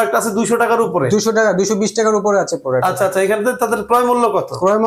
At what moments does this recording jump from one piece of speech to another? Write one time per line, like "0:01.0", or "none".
none